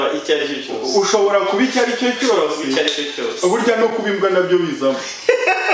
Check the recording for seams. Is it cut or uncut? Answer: uncut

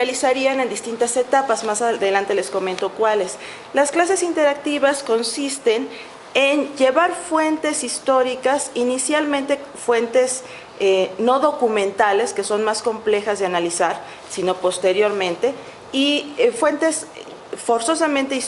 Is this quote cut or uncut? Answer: uncut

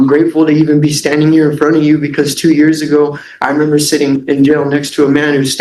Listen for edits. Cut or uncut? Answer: uncut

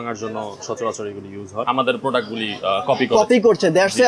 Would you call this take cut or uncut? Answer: cut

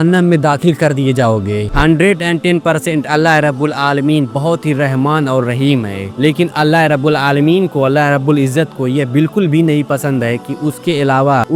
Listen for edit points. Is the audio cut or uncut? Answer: cut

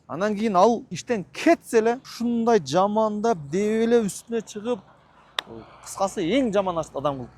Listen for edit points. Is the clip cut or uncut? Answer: uncut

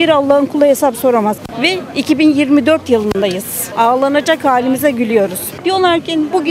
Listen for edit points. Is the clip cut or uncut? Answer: cut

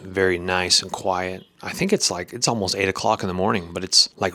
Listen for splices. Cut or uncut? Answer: uncut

